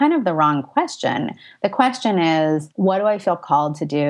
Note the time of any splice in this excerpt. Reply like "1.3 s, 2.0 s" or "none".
2.7 s